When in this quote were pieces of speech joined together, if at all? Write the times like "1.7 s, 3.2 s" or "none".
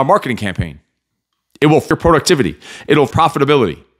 1.9 s, 3.1 s